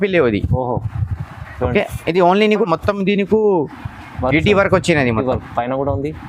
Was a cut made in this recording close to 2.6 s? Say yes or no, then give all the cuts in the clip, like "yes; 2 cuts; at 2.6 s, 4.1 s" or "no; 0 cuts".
yes; 1 cut; at 2.6 s